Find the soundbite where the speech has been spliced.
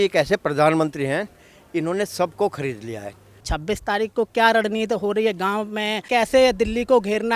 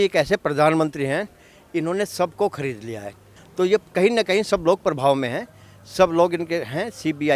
first; 2 cuts; at 3.5 s, 6.1 s

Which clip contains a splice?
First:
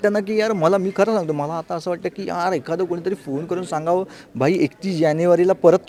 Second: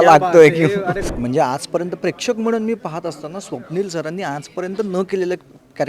second; 1 cut; at 1.1 s

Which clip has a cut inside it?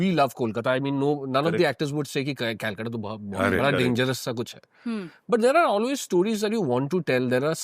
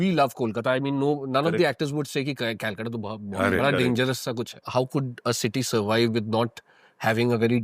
second; 1 cut; at 4.6 s

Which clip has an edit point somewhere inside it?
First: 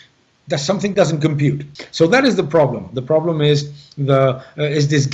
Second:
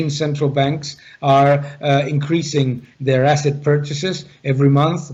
first; 1 cut; at 1.7 s

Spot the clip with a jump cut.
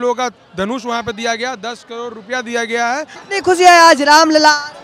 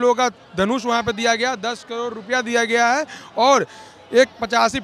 first; 1 cut; at 3.2 s

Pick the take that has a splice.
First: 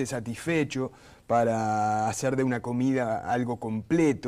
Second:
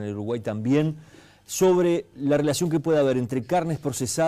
second; 1 cut; at 3.3 s

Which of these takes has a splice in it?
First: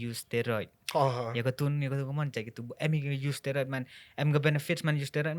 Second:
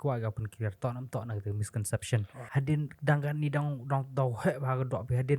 second; 1 cut; at 2.4 s

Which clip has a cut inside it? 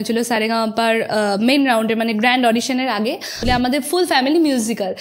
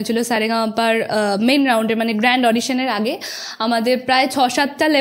first; 1 cut; at 3.5 s

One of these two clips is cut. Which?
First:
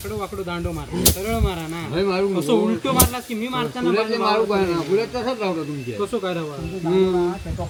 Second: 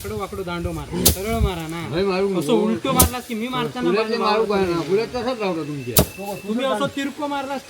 second; 1 cut; at 5.9 s

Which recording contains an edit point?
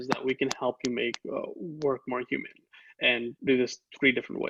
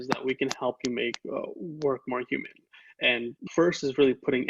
second; 1 cut; at 3.4 s

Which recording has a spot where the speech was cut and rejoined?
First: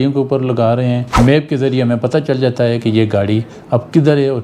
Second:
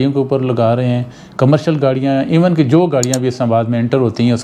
first; 1 cut; at 1.1 s

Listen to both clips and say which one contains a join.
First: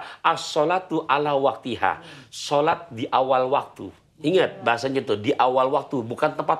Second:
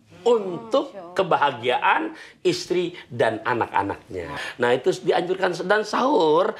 second; 1 cut; at 4.4 s

